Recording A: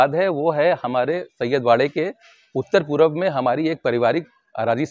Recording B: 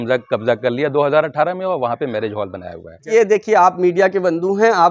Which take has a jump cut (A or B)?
B